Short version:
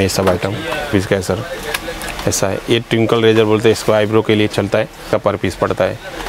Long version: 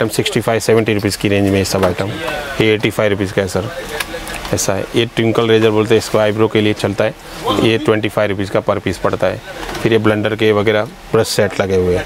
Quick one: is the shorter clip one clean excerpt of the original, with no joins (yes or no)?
no